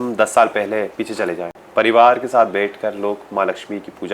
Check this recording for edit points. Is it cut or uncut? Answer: cut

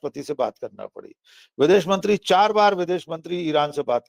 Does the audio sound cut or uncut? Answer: uncut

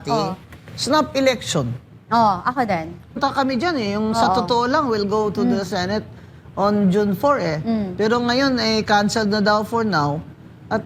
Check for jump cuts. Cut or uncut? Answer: cut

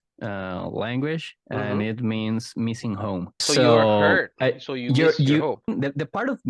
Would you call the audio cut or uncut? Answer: cut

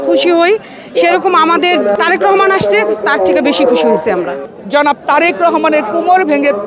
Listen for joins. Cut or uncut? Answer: cut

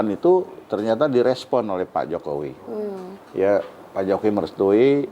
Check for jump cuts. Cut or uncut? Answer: uncut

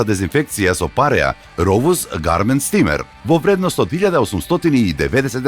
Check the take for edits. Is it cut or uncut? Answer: cut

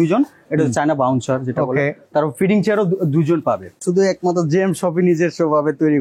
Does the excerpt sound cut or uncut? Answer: cut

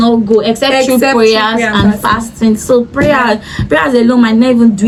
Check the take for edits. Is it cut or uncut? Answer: uncut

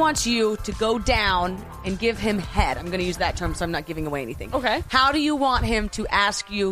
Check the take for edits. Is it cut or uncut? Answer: uncut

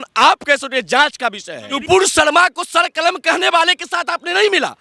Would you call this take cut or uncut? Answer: cut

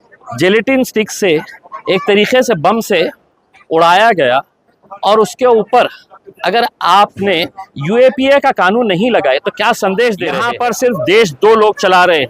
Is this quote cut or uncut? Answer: cut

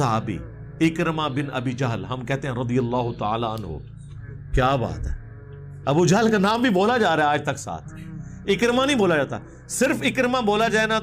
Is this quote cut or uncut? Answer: uncut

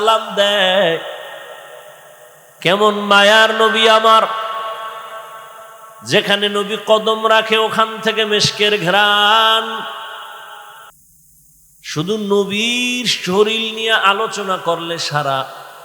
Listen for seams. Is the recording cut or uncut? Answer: cut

